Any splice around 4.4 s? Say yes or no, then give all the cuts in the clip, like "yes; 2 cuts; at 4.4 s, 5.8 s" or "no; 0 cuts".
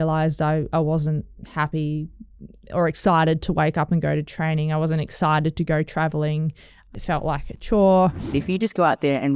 no; 2 cuts; at 6.9 s, 8.2 s